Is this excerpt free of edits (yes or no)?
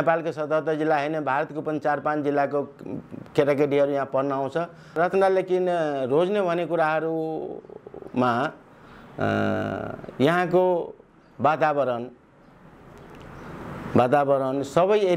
no